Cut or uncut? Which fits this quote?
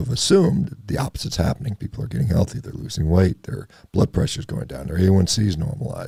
uncut